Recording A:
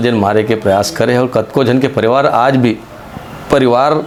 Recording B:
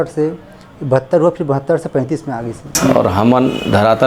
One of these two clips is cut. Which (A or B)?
B